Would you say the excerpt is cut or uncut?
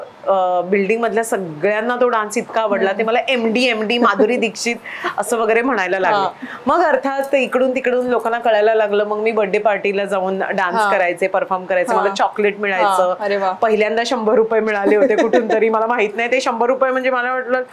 uncut